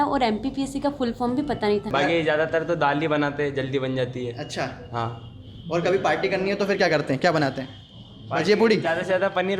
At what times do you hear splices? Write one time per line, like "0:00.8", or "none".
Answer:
0:01.9